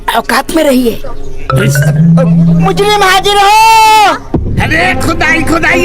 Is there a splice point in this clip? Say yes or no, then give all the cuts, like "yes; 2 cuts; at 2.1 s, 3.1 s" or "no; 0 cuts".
yes; 1 cut; at 4.2 s